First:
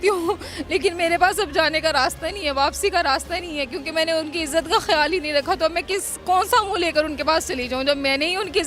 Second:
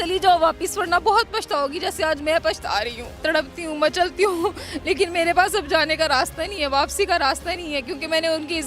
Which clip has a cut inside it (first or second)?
second